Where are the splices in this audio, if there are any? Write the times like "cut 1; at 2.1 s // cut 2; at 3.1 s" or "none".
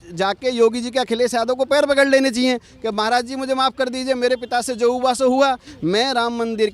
none